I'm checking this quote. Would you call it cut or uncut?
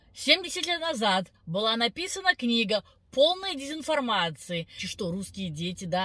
cut